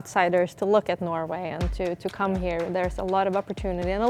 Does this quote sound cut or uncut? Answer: uncut